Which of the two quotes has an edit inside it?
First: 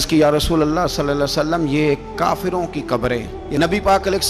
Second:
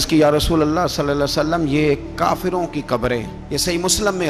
first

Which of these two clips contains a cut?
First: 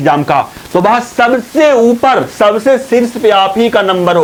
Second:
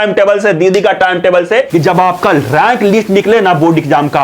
second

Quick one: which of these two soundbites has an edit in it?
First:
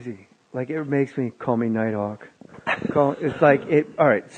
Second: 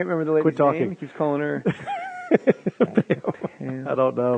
second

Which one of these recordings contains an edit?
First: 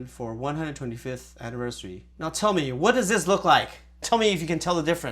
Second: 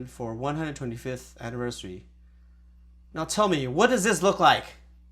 first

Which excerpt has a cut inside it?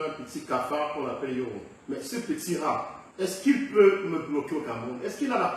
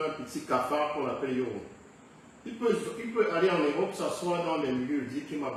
first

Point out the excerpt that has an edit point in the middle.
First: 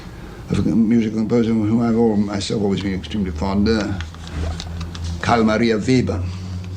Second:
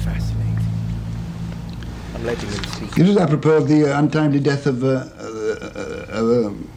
first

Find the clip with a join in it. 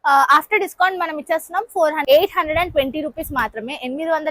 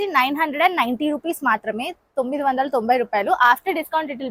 first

